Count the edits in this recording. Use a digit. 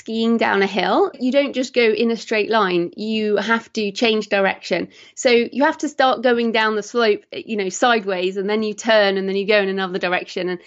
1